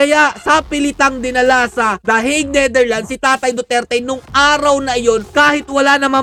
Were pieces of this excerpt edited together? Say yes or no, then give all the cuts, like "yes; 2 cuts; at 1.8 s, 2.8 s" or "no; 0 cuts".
no; 0 cuts